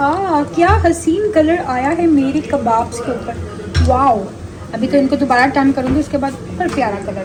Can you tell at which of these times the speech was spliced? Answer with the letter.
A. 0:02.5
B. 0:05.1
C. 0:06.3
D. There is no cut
D